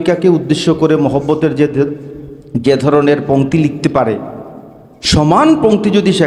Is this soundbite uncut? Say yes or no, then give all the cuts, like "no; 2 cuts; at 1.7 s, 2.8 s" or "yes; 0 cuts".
yes; 0 cuts